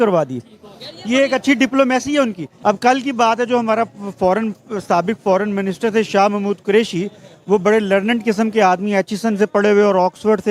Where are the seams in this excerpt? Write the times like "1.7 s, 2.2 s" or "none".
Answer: 2.5 s